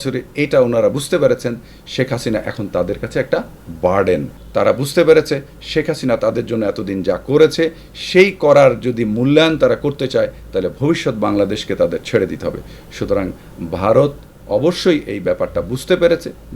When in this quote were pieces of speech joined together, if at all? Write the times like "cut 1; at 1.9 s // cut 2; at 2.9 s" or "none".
cut 1; at 4.4 s